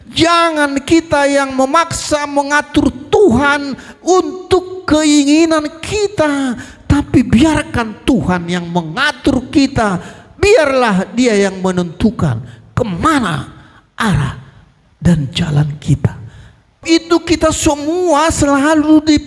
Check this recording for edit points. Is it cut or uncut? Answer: cut